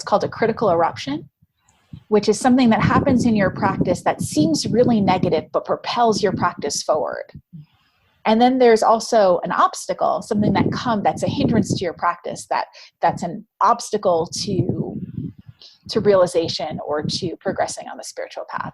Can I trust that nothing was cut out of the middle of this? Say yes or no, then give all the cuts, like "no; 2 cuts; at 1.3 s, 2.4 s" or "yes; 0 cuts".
no; 1 cut; at 12.9 s